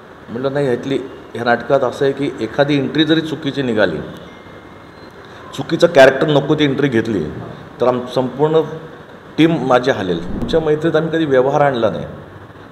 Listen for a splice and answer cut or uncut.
cut